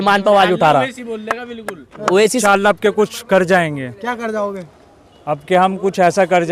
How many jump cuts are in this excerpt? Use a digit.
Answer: 1